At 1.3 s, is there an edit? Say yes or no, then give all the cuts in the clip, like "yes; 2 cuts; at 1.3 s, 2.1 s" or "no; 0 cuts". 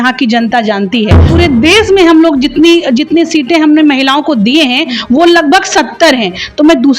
yes; 1 cut; at 1.3 s